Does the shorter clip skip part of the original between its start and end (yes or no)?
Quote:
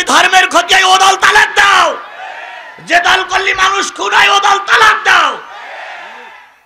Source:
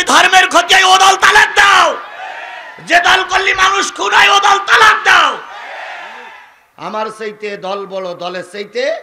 no